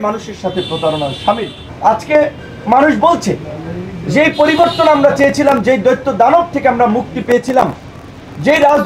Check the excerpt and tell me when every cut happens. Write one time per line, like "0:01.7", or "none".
none